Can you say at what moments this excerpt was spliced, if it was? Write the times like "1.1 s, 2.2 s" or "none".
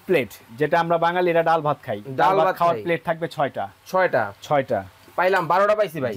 none

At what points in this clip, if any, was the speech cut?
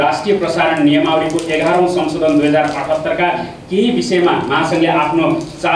none

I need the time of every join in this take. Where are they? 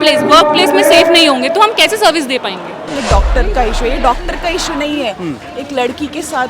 2.9 s

